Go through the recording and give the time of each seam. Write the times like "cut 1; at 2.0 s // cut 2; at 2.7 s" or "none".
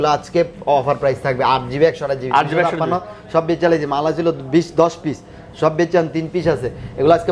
none

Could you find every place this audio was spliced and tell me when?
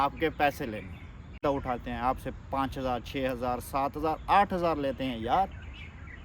cut 1; at 1.4 s

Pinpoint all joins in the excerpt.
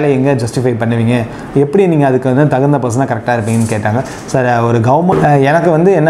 cut 1; at 5.1 s

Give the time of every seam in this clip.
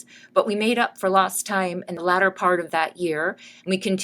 cut 1; at 1.9 s

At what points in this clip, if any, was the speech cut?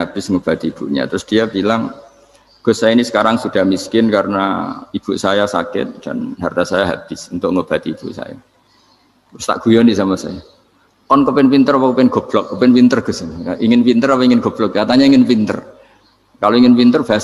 none

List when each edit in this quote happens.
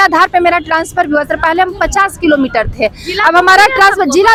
none

